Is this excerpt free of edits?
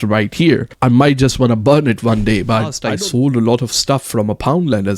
no; 1 cut; at 2.8 s

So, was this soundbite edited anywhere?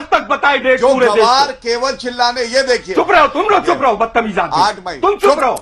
no; 0 cuts

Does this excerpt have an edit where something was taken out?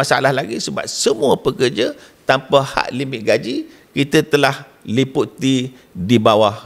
no; 0 cuts

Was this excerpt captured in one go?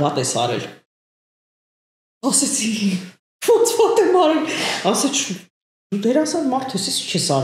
yes; 0 cuts

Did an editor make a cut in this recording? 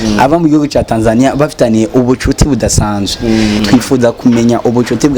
yes; 1 cut; at 3.6 s

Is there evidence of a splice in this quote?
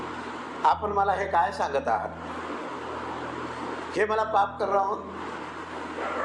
no; 0 cuts

